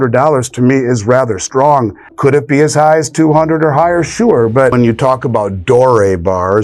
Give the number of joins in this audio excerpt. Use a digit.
2